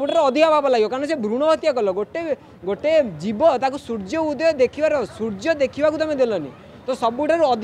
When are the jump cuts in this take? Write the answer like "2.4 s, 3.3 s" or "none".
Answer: none